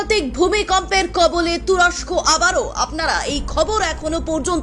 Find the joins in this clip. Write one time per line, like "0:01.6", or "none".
none